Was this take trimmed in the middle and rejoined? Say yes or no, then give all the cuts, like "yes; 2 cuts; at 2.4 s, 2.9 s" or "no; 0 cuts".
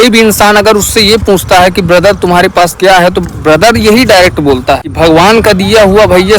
yes; 1 cut; at 4.9 s